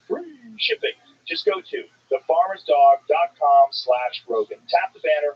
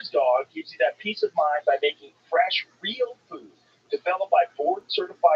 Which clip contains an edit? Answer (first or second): first